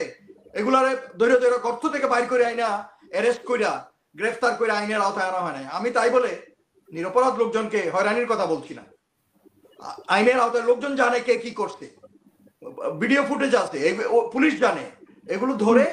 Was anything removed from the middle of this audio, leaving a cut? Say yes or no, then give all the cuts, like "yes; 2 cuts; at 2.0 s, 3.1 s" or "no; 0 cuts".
no; 0 cuts